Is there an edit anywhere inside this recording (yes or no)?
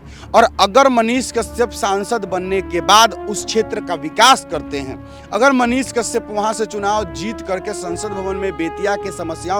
no